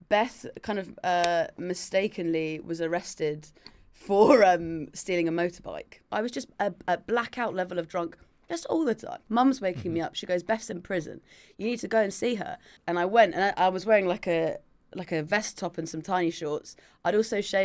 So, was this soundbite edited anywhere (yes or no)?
yes